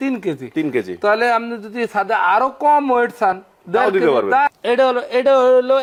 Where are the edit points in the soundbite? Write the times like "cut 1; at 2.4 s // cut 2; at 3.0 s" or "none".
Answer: none